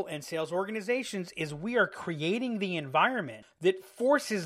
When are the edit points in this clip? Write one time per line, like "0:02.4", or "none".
0:03.4